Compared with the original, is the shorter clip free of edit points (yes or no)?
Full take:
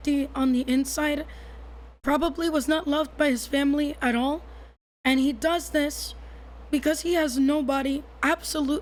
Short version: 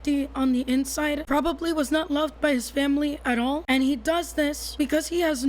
no